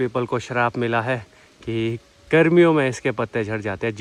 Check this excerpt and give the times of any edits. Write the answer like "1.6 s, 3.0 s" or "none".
none